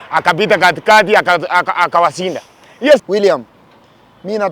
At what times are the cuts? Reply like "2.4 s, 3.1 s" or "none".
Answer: 3.0 s

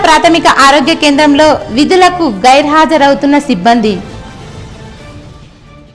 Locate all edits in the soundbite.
none

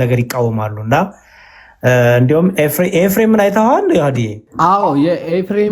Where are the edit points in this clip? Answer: 4.4 s

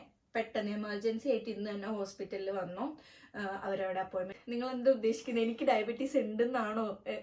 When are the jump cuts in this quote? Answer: 4.3 s

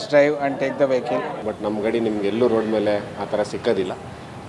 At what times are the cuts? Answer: 1.4 s

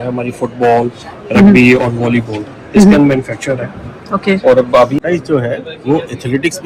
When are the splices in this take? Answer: 5.0 s

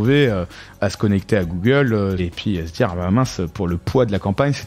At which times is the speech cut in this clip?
2.3 s

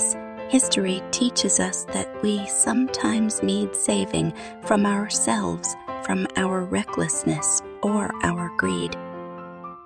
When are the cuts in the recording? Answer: 8.9 s

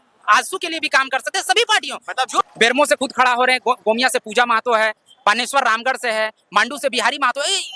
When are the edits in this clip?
2.4 s

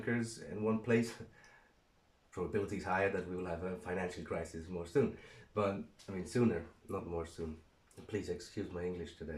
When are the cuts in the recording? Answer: none

